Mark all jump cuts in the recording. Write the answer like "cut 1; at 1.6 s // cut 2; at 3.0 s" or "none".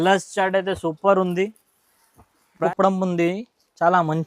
cut 1; at 2.6 s